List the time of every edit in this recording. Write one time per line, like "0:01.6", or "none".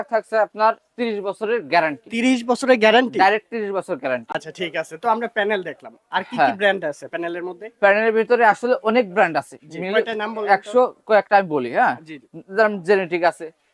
none